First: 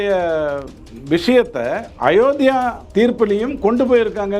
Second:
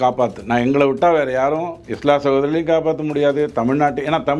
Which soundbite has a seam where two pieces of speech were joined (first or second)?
first